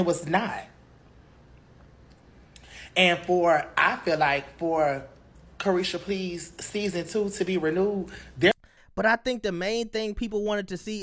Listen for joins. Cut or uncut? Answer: cut